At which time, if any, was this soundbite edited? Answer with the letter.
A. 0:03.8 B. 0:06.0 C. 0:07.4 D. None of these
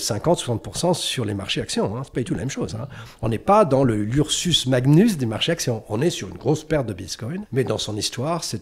C